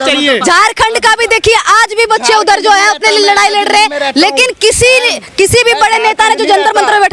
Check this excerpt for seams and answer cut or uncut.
uncut